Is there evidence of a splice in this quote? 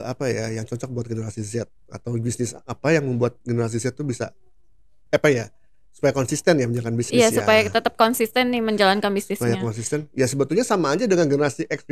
no; 0 cuts

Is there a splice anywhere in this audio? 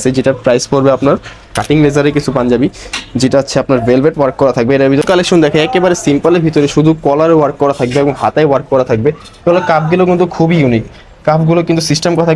yes; 2 cuts; at 1.5 s, 5.0 s

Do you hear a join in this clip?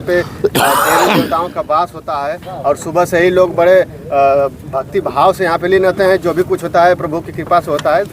no; 0 cuts

